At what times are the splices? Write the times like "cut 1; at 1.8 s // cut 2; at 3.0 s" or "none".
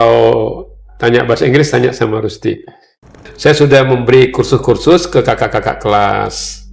cut 1; at 3.3 s